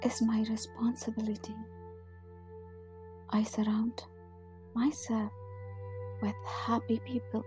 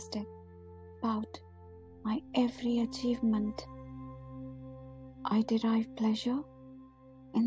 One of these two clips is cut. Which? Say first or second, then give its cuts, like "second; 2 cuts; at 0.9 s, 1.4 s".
first; 2 cuts; at 1.7 s, 3.3 s